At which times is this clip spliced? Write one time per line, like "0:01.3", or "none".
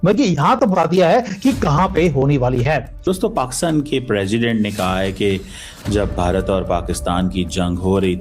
0:03.0